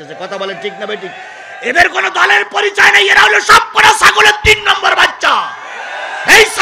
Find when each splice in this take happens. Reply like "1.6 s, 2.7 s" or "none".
none